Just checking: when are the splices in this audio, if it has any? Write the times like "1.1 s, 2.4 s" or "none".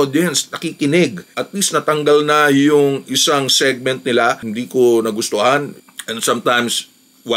1.3 s, 5.7 s